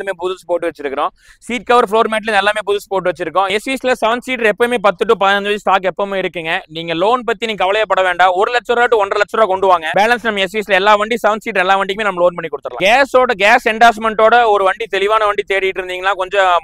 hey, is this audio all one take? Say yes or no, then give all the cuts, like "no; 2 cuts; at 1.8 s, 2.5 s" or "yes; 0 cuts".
no; 3 cuts; at 3.5 s, 9.9 s, 12.7 s